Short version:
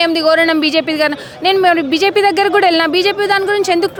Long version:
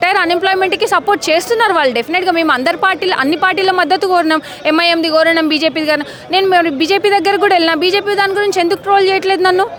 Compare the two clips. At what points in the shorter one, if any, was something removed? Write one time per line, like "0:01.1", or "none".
none